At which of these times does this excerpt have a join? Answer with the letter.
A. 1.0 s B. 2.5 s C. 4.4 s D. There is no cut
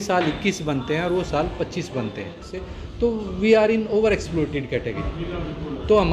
B